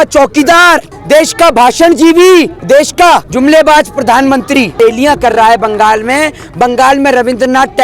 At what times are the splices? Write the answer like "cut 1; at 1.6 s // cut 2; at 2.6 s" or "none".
cut 1; at 0.9 s // cut 2; at 3.0 s // cut 3; at 4.7 s